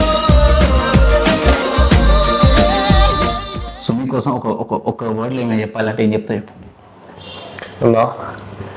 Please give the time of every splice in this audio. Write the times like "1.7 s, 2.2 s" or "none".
3.7 s

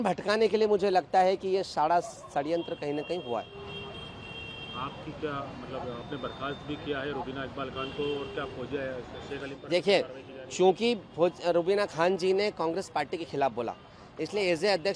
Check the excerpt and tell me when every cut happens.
none

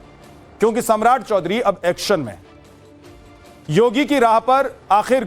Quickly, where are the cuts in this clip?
none

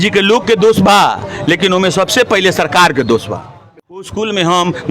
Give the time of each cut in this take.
3.6 s

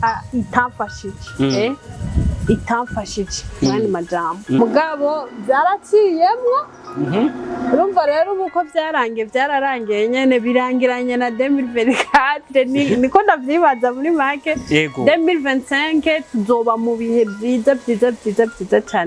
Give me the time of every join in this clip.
4.6 s

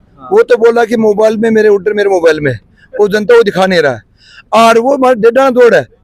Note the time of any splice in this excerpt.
none

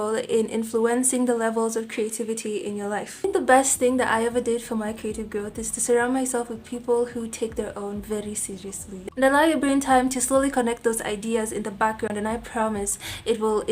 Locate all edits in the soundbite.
3.2 s, 9.1 s

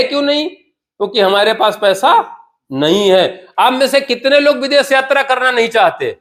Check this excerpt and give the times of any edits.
none

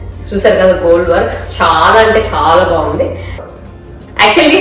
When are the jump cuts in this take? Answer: 3.4 s

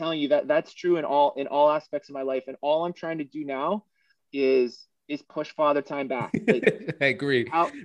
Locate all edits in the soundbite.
none

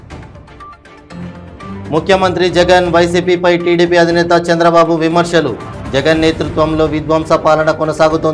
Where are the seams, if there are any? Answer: none

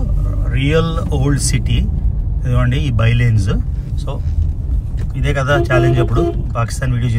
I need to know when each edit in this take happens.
none

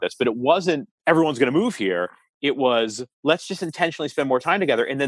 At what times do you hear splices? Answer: 0.9 s, 3.1 s

